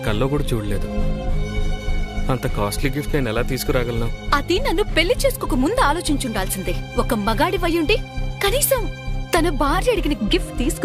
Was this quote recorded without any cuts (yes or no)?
yes